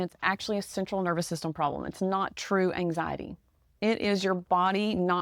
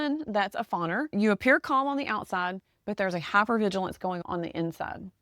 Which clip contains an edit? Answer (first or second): second